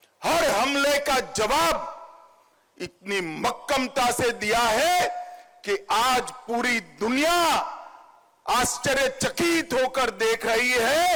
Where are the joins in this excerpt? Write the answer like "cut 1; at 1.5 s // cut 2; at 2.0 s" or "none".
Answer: none

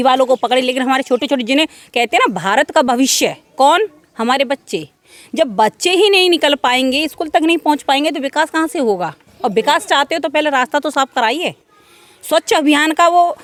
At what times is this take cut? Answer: none

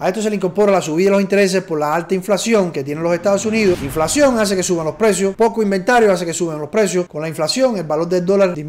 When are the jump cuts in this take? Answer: cut 1; at 3.9 s // cut 2; at 7.1 s

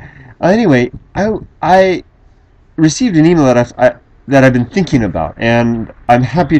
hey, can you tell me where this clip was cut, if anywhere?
cut 1; at 1.6 s

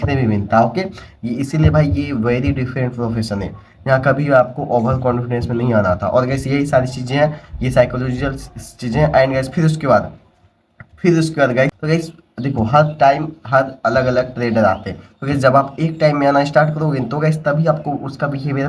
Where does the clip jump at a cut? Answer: cut 1; at 11.8 s

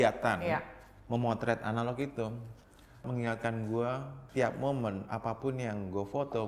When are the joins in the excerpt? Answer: cut 1; at 3.0 s // cut 2; at 4.1 s

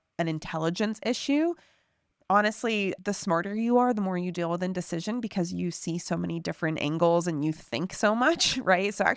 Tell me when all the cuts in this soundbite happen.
cut 1; at 2.9 s

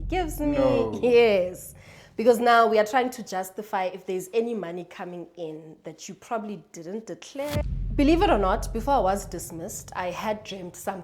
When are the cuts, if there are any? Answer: cut 1; at 7.6 s

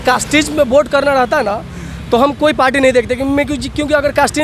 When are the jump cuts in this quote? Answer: none

